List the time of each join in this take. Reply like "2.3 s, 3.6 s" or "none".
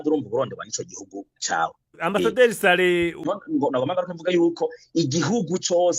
3.3 s